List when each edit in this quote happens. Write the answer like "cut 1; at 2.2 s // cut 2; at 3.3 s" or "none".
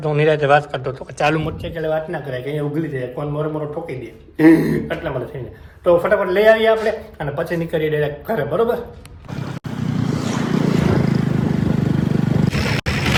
none